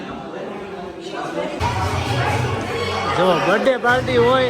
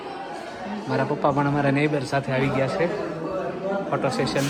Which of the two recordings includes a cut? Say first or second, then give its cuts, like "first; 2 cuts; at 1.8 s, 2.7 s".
first; 1 cut; at 1.6 s